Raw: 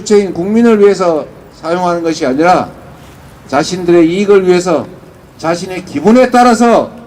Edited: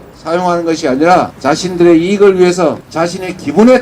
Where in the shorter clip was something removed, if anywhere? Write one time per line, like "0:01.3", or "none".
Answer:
0:01.3
0:02.9